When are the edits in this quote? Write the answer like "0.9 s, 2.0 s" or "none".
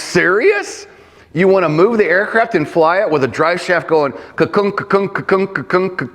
none

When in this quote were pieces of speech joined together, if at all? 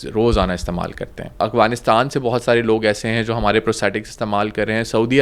1.4 s

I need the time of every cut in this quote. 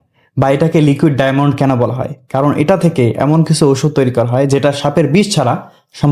none

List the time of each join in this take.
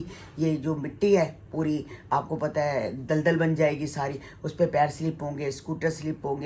none

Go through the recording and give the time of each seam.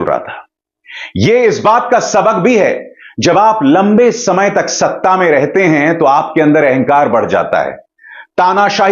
none

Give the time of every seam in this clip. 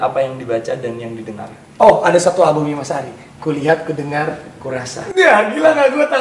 none

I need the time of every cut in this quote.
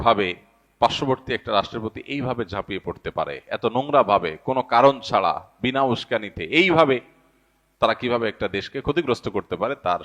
none

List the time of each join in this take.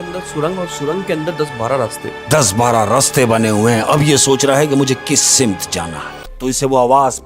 6.3 s

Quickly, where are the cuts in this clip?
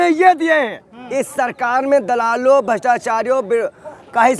0.9 s

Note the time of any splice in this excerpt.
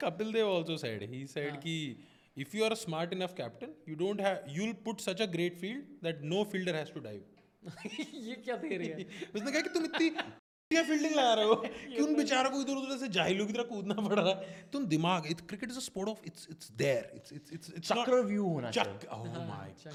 none

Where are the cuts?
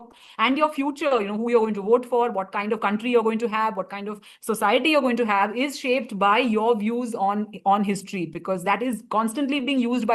none

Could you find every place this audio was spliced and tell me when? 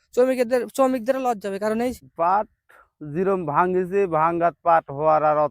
2.0 s

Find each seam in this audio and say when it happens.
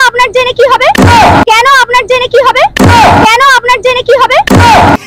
none

